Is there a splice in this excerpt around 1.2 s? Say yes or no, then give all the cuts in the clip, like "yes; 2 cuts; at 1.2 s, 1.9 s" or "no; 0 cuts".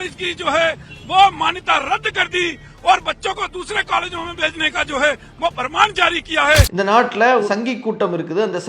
no; 1 cut; at 7.5 s